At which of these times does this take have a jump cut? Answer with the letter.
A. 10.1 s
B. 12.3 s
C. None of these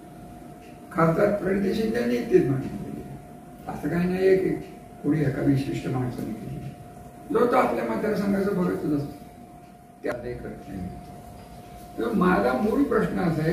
A